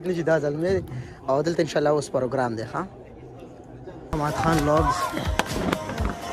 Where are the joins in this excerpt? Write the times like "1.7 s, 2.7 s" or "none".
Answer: 4.2 s